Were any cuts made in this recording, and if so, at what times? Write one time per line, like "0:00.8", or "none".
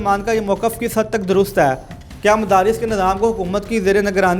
none